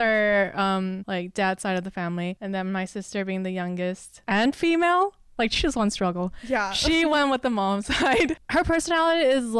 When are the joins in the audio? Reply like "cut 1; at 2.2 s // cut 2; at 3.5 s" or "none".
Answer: cut 1; at 1.0 s // cut 2; at 2.4 s // cut 3; at 4.1 s // cut 4; at 8.4 s